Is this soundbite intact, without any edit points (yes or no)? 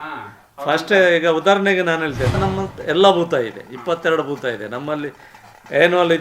no